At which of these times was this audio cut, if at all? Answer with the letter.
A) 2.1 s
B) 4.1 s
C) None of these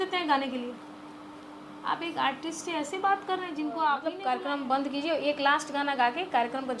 B